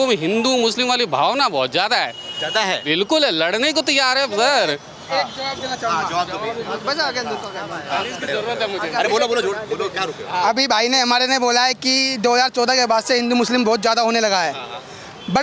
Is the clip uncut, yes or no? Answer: yes